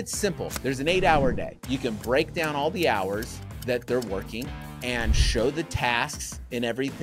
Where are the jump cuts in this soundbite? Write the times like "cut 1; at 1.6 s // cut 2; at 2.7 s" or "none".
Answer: none